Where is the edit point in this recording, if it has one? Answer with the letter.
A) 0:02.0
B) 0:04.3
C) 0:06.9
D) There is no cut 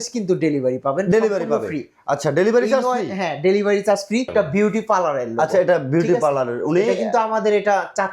B